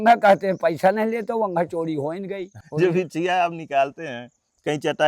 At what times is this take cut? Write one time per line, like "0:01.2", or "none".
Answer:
0:02.6